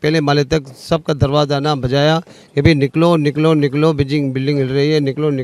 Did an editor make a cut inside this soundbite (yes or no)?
no